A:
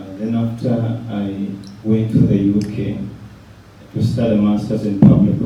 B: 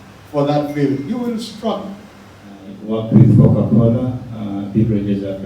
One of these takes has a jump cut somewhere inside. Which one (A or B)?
B